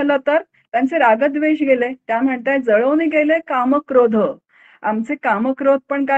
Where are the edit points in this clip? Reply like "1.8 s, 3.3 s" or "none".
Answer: none